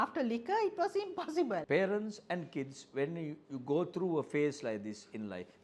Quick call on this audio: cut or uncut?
cut